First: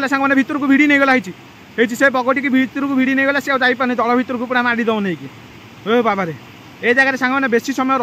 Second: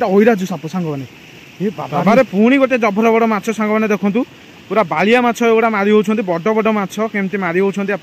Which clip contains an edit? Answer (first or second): second